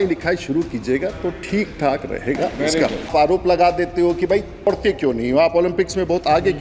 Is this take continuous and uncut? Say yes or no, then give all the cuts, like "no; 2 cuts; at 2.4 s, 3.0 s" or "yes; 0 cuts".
no; 2 cuts; at 3.1 s, 4.7 s